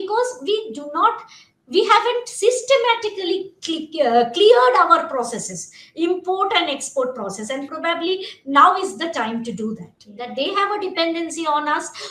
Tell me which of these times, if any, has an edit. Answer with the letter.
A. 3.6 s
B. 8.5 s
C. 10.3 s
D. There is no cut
C